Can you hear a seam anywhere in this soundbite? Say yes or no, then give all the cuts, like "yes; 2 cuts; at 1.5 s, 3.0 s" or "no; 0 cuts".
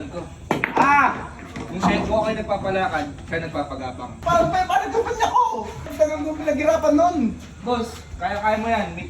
yes; 2 cuts; at 4.1 s, 5.9 s